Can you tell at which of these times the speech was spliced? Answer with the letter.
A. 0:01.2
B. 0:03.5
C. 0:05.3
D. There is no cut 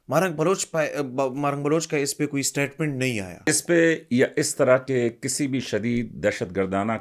B